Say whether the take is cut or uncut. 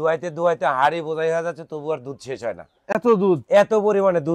uncut